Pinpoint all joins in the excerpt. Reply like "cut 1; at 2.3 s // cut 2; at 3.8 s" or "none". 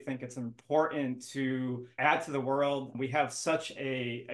cut 1; at 1.9 s // cut 2; at 2.9 s